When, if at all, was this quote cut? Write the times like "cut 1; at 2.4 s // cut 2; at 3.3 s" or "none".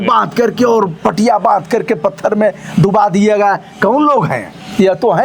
none